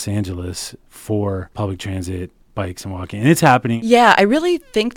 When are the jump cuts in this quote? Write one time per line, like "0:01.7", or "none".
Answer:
0:01.5
0:03.8